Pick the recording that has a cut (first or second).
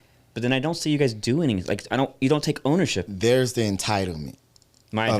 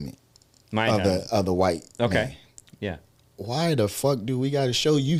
first